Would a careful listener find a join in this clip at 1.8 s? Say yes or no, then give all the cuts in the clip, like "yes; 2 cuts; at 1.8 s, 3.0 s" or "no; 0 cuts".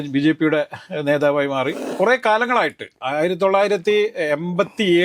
yes; 1 cut; at 1.8 s